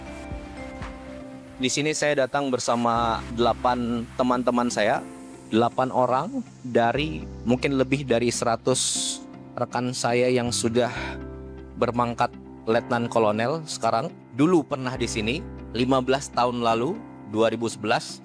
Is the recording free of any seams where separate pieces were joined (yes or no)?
yes